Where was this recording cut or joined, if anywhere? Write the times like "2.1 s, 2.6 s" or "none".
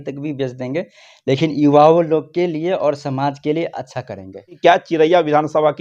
4.5 s